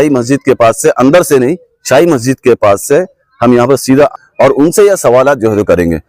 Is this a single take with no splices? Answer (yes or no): no